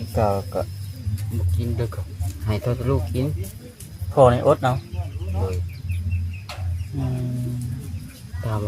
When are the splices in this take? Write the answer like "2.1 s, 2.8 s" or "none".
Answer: none